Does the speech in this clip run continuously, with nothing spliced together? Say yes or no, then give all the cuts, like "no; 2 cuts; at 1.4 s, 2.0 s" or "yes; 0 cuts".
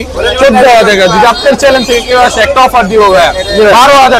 yes; 0 cuts